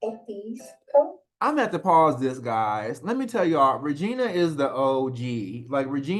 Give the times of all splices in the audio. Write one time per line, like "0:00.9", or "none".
none